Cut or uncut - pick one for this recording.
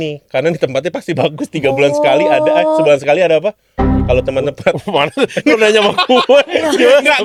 uncut